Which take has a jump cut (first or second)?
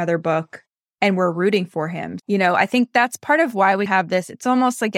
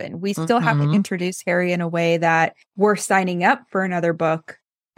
second